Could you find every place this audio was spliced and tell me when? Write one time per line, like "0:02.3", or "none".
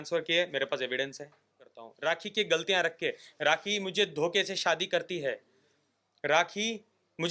0:01.8